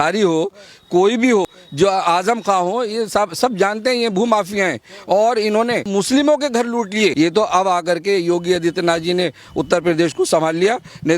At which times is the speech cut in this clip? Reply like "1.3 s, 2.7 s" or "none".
1.6 s, 5.9 s, 7.1 s